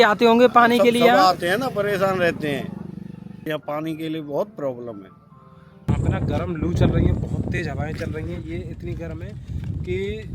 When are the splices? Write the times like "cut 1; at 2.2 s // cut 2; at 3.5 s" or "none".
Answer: cut 1; at 3.5 s // cut 2; at 5.9 s